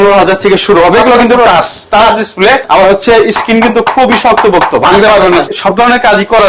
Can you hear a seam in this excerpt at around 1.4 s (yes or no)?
no